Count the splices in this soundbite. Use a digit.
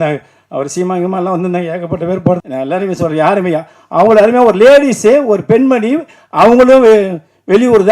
1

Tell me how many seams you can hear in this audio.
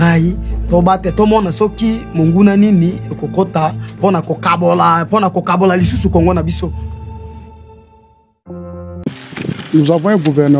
1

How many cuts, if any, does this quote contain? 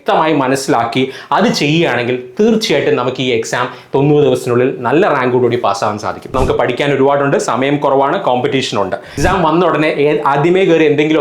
2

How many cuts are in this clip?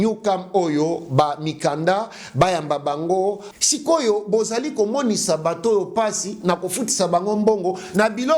1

